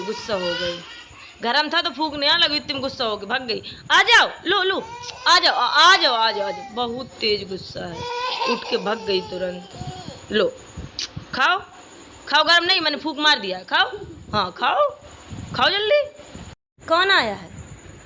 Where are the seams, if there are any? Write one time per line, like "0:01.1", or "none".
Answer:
none